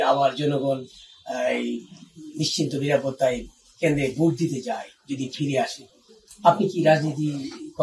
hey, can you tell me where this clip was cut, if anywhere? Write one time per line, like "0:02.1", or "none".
none